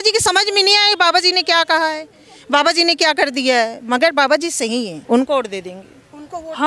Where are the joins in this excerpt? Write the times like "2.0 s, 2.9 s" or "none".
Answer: 5.0 s